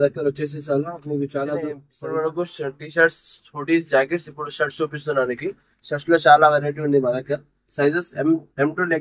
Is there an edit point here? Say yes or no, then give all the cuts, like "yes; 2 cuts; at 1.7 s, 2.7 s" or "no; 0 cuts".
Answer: yes; 1 cut; at 2.1 s